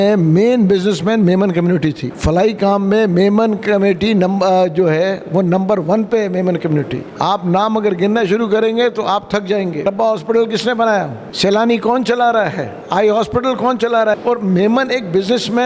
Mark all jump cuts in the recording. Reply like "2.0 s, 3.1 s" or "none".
2.1 s, 7.0 s, 9.8 s, 11.2 s, 12.8 s, 14.2 s